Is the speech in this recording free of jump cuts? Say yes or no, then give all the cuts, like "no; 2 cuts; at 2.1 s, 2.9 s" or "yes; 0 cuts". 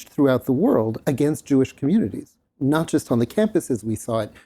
no; 1 cut; at 2.4 s